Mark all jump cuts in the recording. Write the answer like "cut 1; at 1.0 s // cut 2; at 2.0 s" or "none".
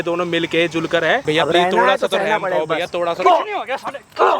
cut 1; at 1.2 s